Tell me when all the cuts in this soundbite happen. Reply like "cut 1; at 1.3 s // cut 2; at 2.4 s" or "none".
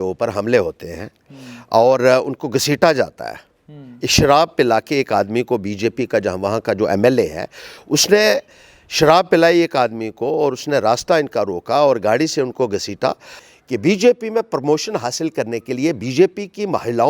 cut 1; at 13.4 s